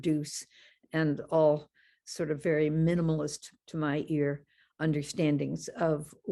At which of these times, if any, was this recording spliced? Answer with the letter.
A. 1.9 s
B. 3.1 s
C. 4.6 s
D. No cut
D